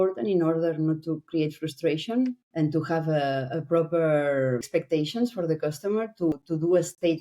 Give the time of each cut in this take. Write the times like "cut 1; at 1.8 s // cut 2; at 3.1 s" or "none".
cut 1; at 2.4 s // cut 2; at 4.7 s // cut 3; at 6.3 s